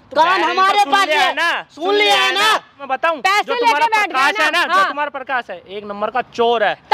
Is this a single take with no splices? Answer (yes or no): no